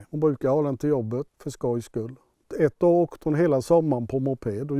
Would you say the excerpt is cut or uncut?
cut